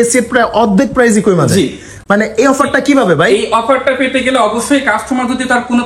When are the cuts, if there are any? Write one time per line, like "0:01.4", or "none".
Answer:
none